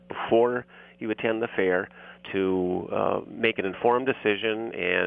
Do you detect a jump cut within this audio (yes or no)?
no